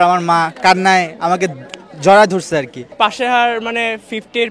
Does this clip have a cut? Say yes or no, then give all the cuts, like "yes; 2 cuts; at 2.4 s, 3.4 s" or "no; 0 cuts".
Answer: yes; 1 cut; at 2.8 s